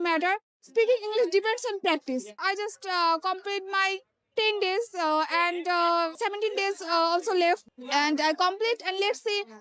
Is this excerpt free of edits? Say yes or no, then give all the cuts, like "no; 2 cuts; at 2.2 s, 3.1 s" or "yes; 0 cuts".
no; 3 cuts; at 2.4 s, 6.1 s, 7.7 s